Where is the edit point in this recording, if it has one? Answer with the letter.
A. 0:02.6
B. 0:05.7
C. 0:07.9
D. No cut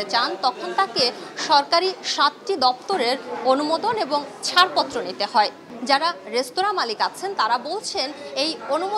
B